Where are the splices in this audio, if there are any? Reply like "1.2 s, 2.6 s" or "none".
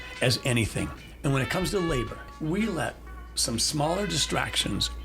1.1 s, 2.2 s